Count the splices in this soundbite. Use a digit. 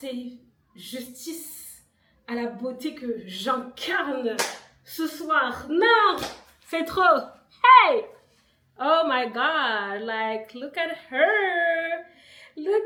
0